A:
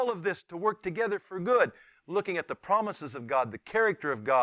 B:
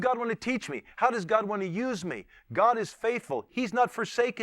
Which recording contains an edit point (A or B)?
B